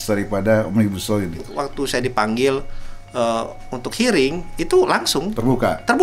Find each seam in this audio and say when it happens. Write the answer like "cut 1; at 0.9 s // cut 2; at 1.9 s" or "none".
cut 1; at 1.6 s